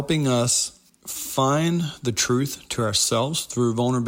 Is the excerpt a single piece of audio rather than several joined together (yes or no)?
yes